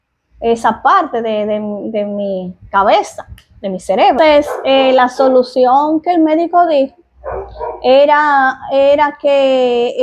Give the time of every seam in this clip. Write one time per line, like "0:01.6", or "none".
0:04.2